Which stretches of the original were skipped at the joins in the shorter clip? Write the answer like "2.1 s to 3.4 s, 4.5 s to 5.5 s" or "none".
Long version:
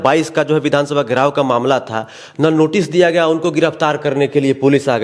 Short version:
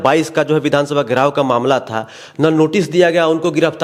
none